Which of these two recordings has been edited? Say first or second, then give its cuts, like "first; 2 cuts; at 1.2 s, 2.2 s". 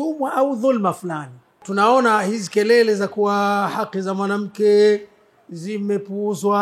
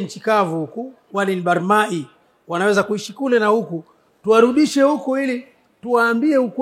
first; 1 cut; at 1.6 s